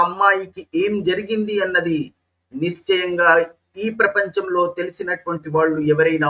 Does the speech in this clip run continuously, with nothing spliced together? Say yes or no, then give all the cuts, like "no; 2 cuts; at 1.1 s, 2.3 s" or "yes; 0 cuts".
yes; 0 cuts